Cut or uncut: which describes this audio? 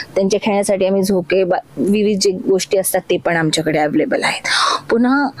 uncut